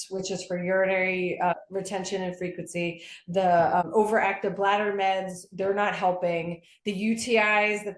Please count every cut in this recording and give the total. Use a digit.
2